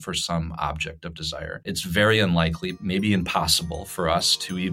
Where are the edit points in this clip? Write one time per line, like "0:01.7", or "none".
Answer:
0:01.7